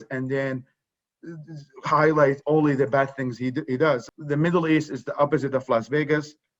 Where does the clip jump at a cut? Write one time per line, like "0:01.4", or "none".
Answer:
0:04.1